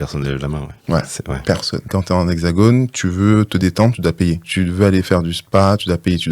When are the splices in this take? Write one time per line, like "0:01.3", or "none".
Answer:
0:01.8
0:04.4